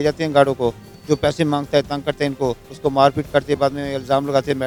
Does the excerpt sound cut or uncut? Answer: uncut